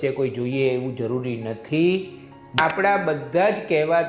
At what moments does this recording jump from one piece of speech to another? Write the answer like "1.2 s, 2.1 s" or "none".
2.6 s